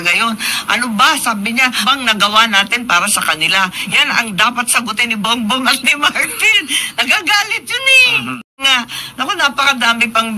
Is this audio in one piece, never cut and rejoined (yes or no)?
no